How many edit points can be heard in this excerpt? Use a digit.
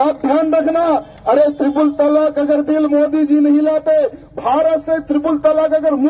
0